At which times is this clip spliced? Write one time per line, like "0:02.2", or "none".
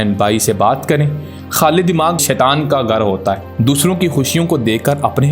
0:02.2
0:03.4